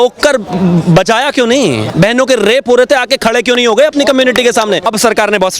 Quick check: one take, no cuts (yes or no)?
no